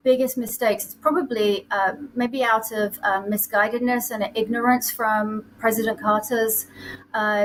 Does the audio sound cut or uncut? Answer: uncut